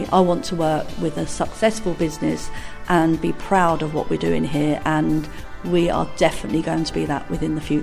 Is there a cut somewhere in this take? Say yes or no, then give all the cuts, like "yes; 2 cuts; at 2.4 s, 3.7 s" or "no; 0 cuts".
no; 0 cuts